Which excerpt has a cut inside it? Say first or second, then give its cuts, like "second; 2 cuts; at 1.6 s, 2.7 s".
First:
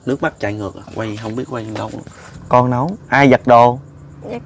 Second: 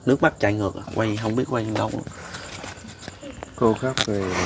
first; 1 cut; at 2.3 s